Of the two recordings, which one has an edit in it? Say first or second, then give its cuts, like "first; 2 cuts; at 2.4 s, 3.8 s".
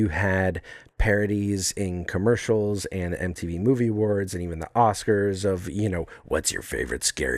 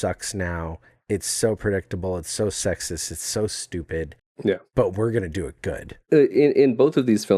second; 2 cuts; at 4.6 s, 5.9 s